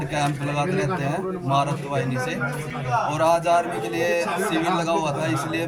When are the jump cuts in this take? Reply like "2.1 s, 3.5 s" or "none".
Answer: none